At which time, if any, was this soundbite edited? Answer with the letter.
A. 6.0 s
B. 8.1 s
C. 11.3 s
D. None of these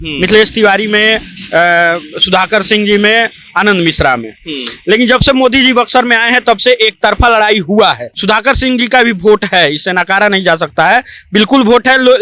B